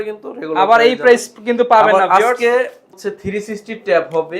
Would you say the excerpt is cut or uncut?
cut